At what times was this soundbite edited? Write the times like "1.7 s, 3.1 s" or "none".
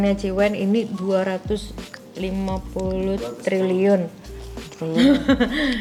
none